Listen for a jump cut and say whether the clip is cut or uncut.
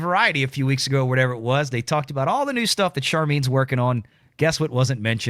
uncut